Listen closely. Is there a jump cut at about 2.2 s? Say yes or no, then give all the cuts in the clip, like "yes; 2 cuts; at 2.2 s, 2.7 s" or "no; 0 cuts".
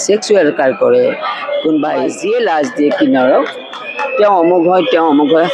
yes; 1 cut; at 2.2 s